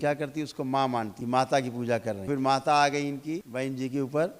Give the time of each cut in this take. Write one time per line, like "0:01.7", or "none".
0:01.2
0:02.3
0:03.5